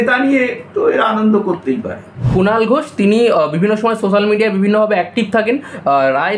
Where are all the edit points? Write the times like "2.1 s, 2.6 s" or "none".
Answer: 2.2 s